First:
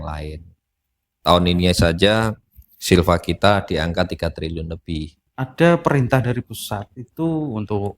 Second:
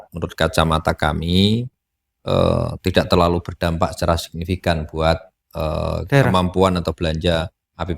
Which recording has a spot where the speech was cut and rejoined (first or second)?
first